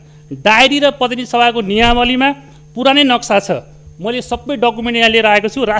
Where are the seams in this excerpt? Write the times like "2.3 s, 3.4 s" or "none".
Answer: none